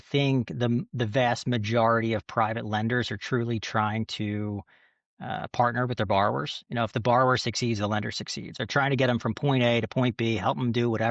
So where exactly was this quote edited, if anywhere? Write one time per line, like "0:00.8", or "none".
0:08.6